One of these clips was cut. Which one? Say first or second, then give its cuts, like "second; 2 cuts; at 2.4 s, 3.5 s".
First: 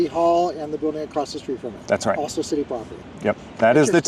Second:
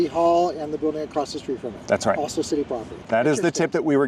second; 1 cut; at 3.0 s